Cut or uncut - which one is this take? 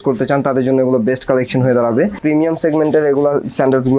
cut